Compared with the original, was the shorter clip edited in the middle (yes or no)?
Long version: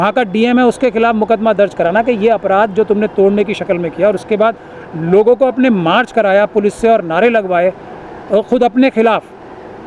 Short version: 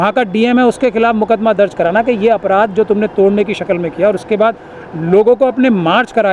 no